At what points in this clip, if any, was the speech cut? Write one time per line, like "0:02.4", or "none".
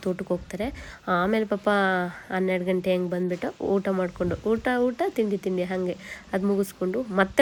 none